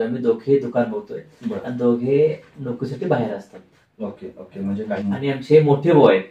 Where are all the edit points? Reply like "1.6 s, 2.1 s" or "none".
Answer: 5.0 s